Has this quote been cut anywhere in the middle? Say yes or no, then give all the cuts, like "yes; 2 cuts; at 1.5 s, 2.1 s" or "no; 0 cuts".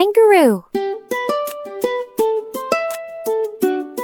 no; 0 cuts